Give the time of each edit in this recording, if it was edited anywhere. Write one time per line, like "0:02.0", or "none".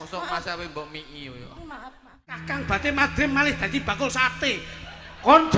0:02.5